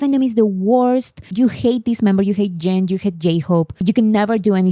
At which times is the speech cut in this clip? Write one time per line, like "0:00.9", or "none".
0:03.8